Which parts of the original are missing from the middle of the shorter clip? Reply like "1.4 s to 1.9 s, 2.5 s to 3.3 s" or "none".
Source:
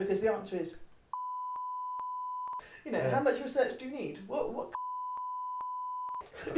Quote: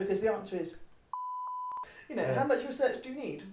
1.5 s to 2.2 s